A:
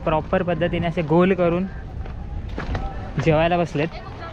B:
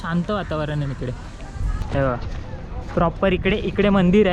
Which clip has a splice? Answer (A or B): B